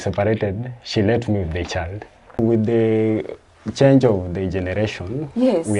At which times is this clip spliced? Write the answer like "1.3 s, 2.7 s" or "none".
2.4 s